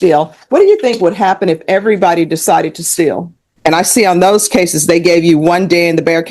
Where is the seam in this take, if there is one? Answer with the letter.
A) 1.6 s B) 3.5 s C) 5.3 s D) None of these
B